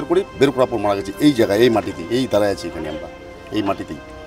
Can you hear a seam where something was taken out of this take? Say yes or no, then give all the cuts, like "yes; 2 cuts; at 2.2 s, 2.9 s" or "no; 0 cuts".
no; 0 cuts